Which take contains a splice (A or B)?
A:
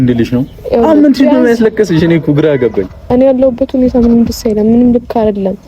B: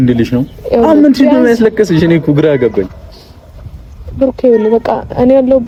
A